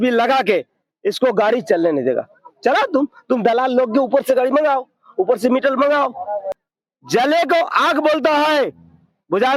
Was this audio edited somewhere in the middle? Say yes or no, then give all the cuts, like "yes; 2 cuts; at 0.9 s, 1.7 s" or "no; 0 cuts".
yes; 1 cut; at 6.5 s